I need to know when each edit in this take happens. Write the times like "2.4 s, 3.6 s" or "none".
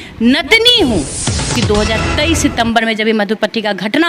1.5 s